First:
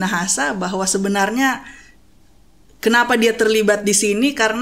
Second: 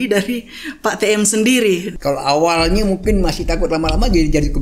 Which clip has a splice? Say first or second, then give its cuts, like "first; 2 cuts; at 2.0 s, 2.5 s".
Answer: second; 1 cut; at 1.9 s